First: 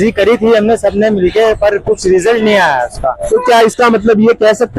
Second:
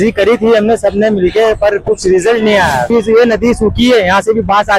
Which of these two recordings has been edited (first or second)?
second